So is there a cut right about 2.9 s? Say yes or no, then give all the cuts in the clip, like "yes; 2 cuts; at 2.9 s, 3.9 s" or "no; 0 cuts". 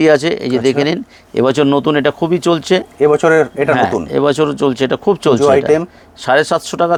no; 0 cuts